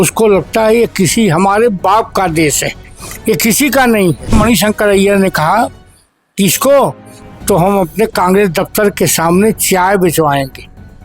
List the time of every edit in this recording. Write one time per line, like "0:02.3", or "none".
0:04.3